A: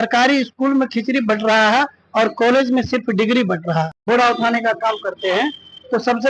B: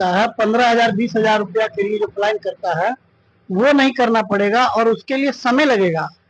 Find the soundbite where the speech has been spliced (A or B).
A